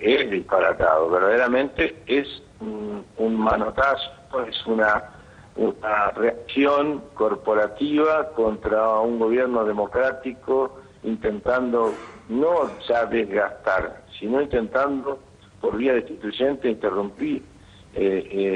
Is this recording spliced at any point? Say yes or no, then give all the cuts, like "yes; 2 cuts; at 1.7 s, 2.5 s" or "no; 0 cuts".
no; 0 cuts